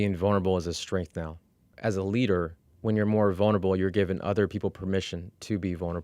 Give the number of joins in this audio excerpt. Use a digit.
2